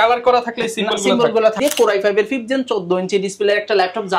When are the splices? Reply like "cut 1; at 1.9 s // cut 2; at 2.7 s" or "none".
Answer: cut 1; at 1.6 s

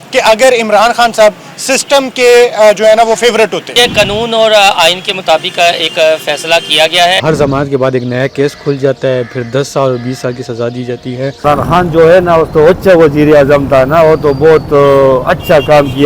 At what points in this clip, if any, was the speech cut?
cut 1; at 3.7 s // cut 2; at 7.2 s // cut 3; at 11.4 s

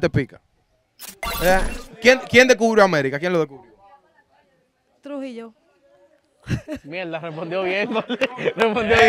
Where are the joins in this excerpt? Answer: cut 1; at 1.2 s

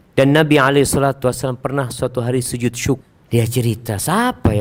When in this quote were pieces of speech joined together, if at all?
cut 1; at 3.1 s

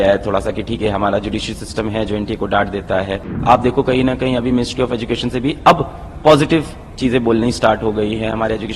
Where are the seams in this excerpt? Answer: cut 1; at 3.3 s

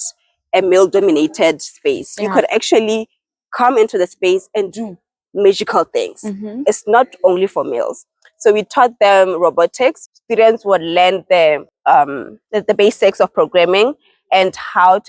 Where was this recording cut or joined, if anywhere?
cut 1; at 10.1 s // cut 2; at 11.7 s

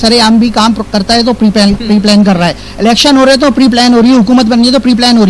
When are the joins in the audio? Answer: none

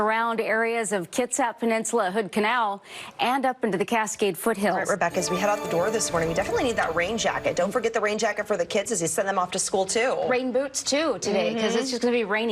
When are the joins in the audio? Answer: cut 1; at 4.8 s

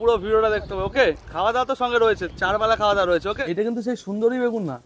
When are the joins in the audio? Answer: cut 1; at 1.3 s // cut 2; at 2.3 s // cut 3; at 3.4 s

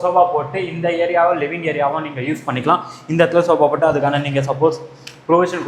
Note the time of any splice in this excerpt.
none

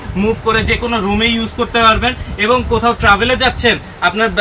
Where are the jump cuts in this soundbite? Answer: none

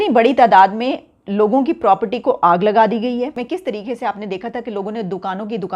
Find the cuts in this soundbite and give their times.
cut 1; at 3.4 s

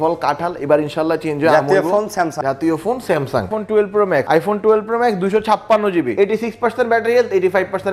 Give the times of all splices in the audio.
cut 1; at 2.4 s // cut 2; at 3.5 s // cut 3; at 4.2 s // cut 4; at 6.1 s

